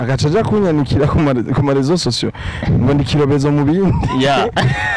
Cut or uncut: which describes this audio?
uncut